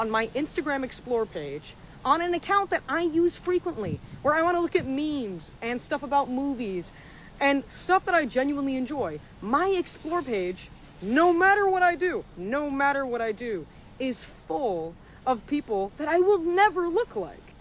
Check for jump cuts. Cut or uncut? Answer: uncut